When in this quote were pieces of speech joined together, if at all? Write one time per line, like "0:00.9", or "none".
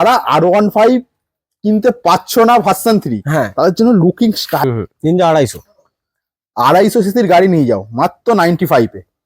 0:04.6